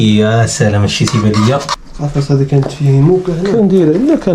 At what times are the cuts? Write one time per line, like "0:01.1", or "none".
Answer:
0:01.8